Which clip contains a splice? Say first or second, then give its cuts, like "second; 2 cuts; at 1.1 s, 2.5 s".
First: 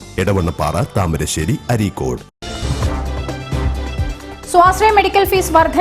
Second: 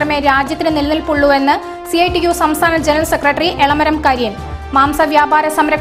first; 2 cuts; at 2.4 s, 4.2 s